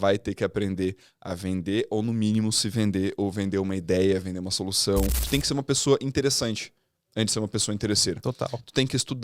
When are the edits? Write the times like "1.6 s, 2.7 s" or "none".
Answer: 5.2 s